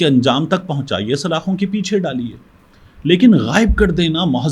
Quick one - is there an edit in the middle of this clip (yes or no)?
no